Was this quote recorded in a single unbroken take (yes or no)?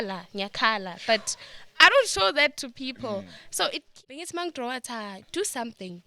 no